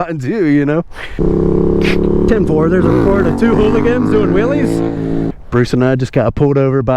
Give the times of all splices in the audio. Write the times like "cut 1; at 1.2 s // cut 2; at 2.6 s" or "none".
cut 1; at 1.2 s // cut 2; at 5.0 s